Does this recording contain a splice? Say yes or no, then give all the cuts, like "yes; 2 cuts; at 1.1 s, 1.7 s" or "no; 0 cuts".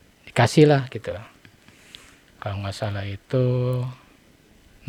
no; 0 cuts